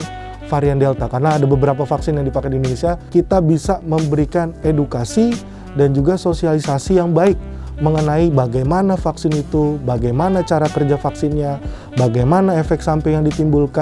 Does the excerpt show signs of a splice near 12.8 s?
no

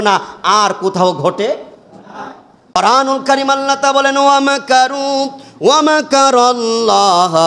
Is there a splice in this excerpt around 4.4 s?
no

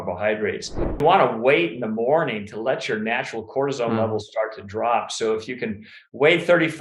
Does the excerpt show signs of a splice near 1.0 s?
yes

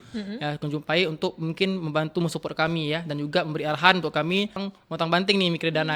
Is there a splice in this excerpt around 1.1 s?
no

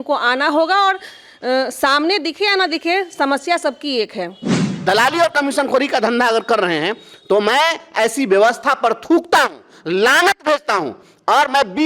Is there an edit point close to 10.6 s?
no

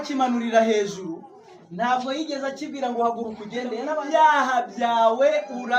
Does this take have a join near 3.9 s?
yes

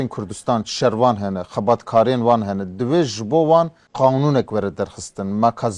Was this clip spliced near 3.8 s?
yes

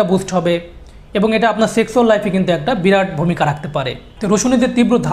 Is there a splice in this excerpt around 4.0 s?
yes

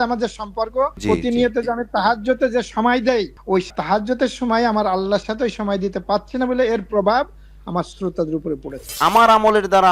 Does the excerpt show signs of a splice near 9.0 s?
yes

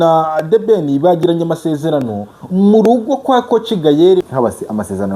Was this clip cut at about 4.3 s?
yes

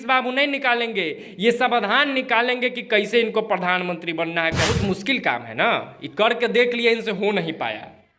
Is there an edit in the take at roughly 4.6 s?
yes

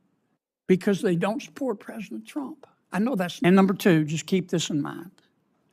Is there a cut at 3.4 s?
yes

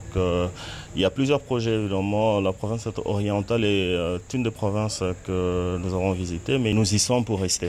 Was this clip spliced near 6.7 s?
yes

